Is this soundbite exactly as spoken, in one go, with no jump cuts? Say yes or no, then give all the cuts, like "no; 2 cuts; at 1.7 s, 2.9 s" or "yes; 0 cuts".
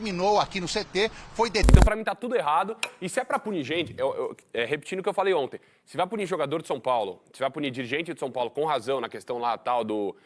no; 1 cut; at 1.7 s